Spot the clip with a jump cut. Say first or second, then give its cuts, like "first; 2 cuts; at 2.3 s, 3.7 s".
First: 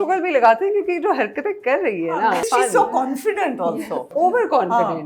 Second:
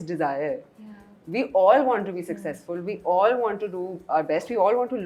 first; 2 cuts; at 2.5 s, 4.1 s